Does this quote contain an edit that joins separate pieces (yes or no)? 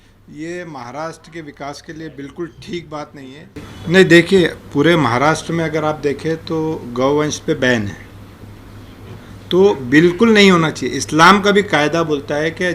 yes